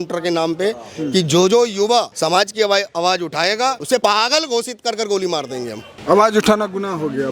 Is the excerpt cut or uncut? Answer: cut